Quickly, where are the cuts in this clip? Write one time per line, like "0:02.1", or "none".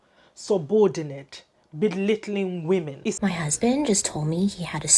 0:03.2

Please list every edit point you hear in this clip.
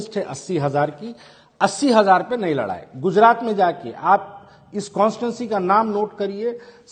none

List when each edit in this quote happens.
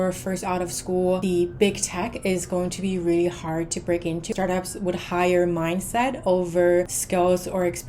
0:01.2
0:04.3
0:07.0

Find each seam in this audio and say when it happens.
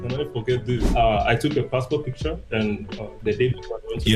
0:00.9
0:03.2

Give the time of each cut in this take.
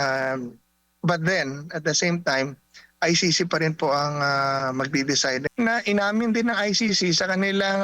0:05.5

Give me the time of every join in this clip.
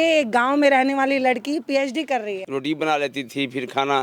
0:02.4

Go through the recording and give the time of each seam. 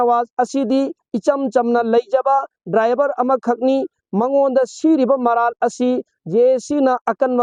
none

